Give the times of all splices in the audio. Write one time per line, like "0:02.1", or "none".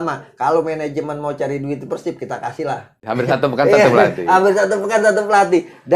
0:03.0